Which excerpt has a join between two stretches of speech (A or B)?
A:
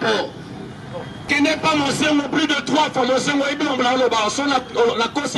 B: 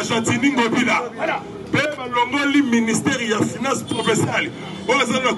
A